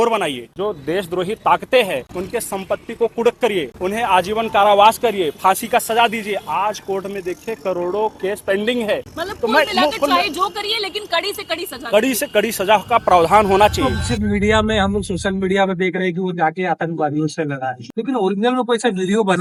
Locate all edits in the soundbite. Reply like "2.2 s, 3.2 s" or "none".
none